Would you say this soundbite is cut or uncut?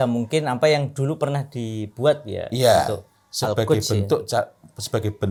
uncut